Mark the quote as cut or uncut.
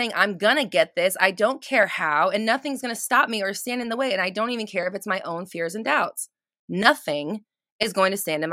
uncut